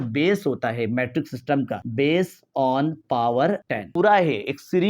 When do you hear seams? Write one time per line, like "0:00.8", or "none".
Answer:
0:01.8
0:03.8